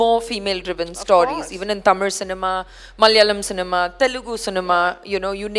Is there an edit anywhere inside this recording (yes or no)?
no